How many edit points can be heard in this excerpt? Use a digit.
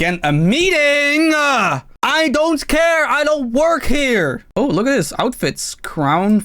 1